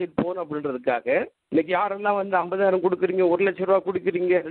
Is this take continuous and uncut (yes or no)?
no